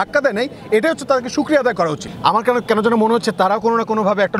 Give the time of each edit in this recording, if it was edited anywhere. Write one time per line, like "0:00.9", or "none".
0:02.1